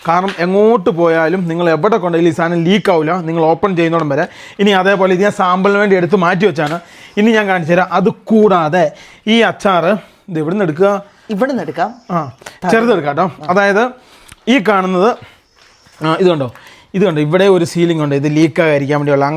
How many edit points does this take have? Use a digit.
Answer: 0